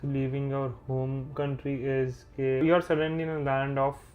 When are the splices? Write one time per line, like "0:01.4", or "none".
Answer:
0:01.3
0:02.6